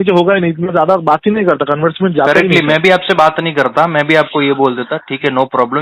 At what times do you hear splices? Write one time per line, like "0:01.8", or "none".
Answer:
none